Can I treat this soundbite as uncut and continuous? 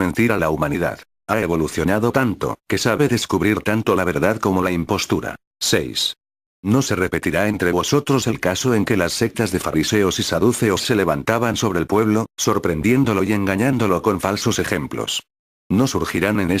yes; 0 cuts

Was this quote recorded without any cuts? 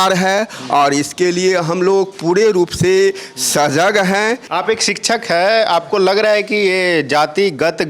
no; 1 cut; at 4.4 s

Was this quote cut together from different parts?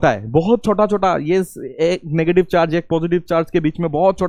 no; 0 cuts

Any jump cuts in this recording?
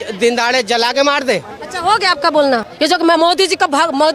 yes; 1 cut; at 2.7 s

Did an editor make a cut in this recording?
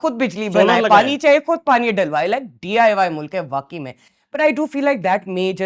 no; 0 cuts

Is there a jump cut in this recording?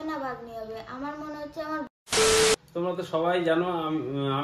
yes; 2 cuts; at 1.9 s, 2.7 s

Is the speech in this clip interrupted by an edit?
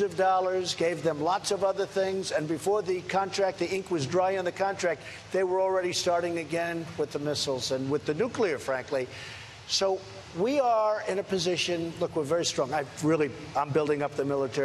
no; 0 cuts

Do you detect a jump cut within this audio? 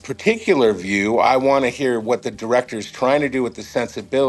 yes; 1 cut; at 1.3 s

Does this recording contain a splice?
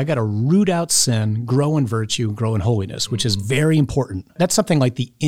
yes; 1 cut; at 4.4 s

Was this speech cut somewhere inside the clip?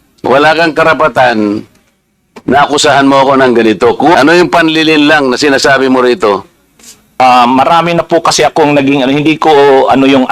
yes; 2 cuts; at 4.1 s, 7.2 s

